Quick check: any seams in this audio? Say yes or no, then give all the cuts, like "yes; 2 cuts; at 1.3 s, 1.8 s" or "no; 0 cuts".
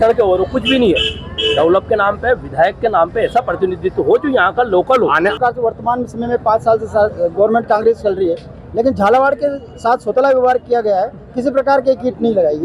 yes; 1 cut; at 5.4 s